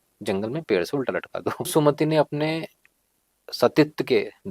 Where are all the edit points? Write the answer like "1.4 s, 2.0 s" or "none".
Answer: 1.7 s